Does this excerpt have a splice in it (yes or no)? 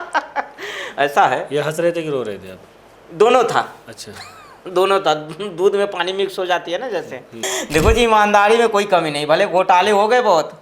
yes